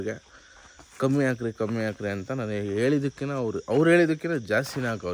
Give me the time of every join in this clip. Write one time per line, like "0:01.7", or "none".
none